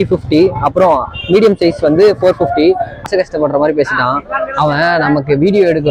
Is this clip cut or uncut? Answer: cut